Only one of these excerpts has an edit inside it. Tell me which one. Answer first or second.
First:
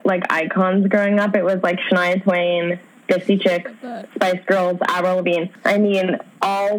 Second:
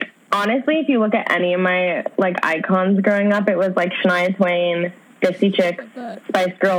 first